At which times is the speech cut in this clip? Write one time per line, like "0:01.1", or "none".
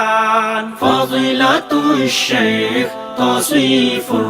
none